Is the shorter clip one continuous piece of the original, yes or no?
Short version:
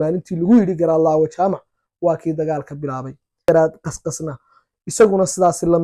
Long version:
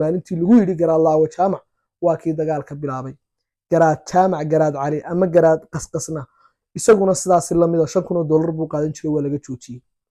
no